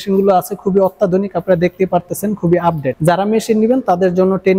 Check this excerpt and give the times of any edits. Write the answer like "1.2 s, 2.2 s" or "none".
3.0 s